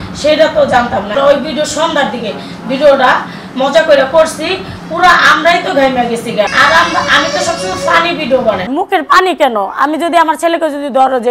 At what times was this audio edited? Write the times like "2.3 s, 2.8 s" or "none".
1.1 s, 6.5 s, 8.7 s